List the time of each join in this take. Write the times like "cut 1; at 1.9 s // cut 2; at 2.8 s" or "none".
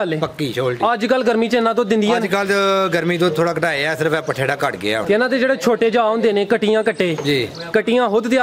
cut 1; at 5.0 s